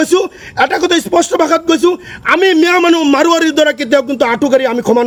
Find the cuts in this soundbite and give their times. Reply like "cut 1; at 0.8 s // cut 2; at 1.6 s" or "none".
none